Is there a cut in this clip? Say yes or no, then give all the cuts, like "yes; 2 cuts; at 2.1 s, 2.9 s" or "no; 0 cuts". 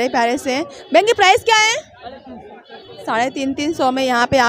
no; 0 cuts